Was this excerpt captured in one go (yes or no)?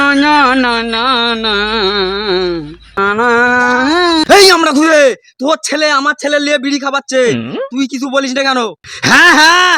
yes